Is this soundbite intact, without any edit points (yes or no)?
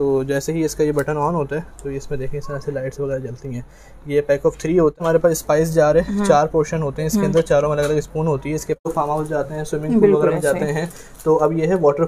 no